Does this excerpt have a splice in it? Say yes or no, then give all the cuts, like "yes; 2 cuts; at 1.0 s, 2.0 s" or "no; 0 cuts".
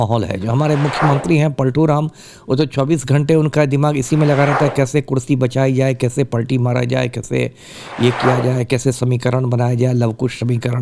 no; 0 cuts